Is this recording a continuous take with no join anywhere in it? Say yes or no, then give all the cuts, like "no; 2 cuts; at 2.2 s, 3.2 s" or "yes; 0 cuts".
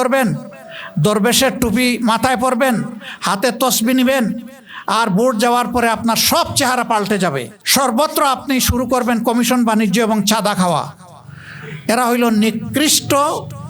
no; 1 cut; at 7.6 s